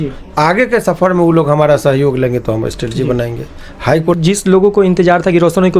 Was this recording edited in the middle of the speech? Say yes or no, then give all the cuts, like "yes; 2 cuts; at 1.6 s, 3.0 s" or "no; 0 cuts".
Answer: yes; 1 cut; at 4.2 s